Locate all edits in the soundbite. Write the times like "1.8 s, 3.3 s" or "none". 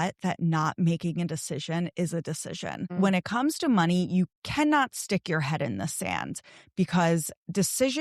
2.9 s, 4.4 s